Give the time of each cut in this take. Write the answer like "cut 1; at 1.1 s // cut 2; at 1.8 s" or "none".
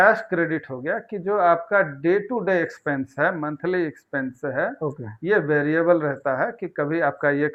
none